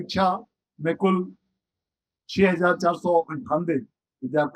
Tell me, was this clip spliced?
no; 0 cuts

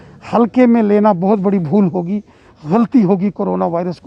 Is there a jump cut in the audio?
no; 0 cuts

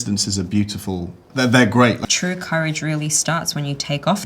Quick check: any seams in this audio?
yes; 1 cut; at 2.0 s

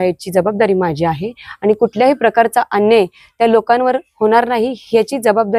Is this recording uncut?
yes; 0 cuts

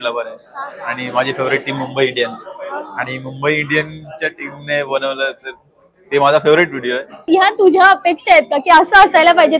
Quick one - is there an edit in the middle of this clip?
yes; 1 cut; at 7.1 s

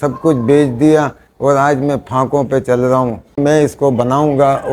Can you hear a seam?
yes; 1 cut; at 3.4 s

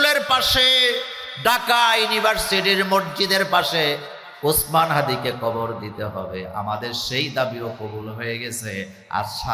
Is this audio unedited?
yes; 0 cuts

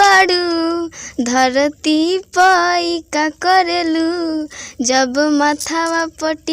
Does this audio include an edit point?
no; 0 cuts

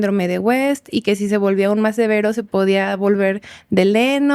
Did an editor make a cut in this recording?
no; 0 cuts

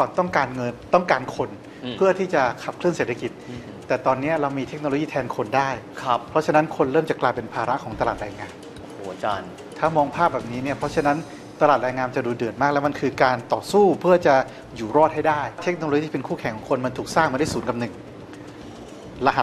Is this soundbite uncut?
yes; 0 cuts

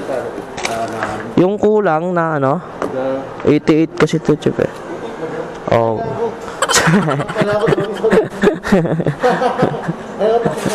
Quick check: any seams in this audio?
no; 0 cuts

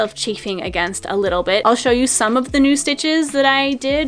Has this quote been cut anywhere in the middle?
yes; 1 cut; at 1.6 s

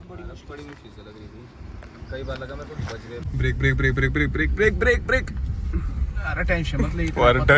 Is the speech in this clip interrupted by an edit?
yes; 1 cut; at 3.2 s

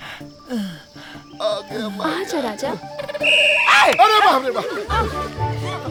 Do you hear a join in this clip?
no; 0 cuts

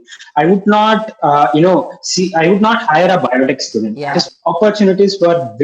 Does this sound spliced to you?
yes; 1 cut; at 4.2 s

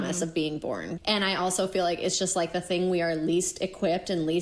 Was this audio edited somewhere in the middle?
yes; 1 cut; at 0.9 s

